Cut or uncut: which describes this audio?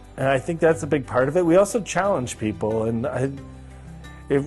uncut